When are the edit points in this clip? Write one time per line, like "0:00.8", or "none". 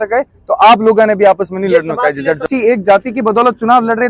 0:02.4